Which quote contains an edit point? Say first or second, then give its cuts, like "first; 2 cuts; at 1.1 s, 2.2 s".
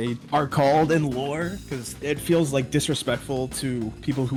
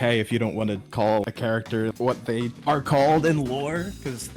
second; 1 cut; at 1.2 s